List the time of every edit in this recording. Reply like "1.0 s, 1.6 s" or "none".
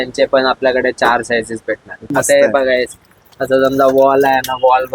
2.1 s